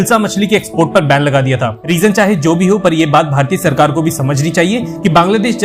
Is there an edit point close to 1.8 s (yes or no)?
yes